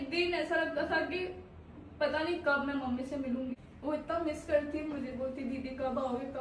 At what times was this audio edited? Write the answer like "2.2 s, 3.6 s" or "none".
3.6 s